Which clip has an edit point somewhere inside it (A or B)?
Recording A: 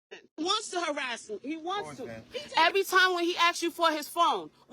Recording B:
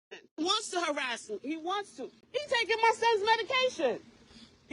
A